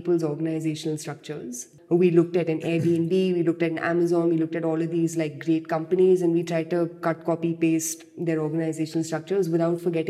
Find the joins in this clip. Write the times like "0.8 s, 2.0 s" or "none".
1.7 s